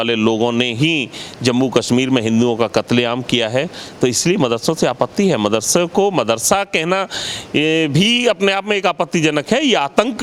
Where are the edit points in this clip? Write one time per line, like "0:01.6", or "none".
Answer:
none